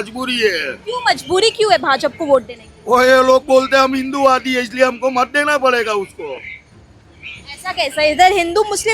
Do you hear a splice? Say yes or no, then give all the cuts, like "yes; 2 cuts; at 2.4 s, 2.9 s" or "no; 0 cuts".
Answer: no; 0 cuts